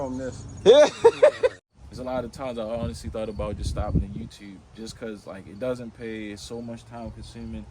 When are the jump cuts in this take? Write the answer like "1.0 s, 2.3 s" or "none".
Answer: 1.5 s